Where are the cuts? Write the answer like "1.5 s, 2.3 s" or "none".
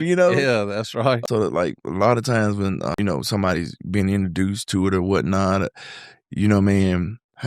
1.2 s, 2.9 s